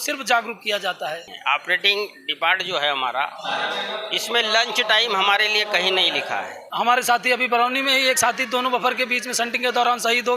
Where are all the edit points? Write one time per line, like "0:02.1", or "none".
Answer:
0:01.3
0:06.6